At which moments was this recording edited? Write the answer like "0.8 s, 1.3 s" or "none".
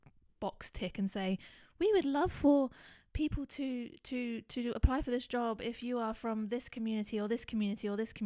none